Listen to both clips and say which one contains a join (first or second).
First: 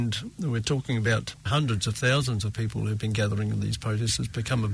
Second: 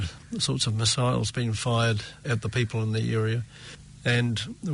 first